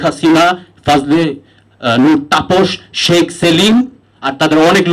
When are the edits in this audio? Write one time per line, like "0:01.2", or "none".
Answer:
none